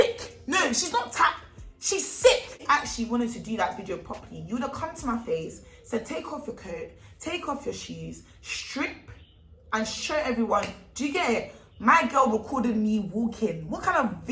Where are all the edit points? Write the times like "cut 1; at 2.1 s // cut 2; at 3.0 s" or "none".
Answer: cut 1; at 2.6 s